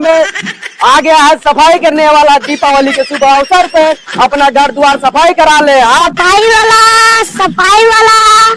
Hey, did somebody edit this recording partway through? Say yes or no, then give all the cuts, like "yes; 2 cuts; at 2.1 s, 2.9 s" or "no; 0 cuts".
yes; 1 cut; at 6.1 s